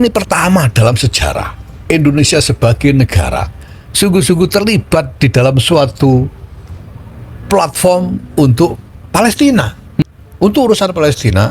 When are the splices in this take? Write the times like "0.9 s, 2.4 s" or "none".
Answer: 10.0 s